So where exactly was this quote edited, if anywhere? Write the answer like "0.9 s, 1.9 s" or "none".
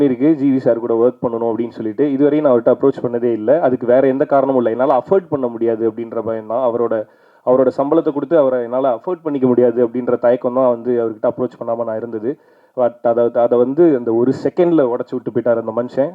none